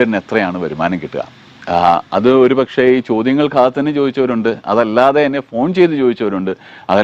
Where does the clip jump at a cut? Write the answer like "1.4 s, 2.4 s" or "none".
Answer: none